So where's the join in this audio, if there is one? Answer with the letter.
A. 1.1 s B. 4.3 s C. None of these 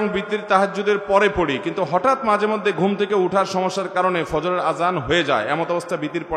C